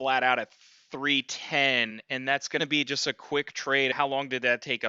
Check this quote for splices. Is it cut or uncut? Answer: cut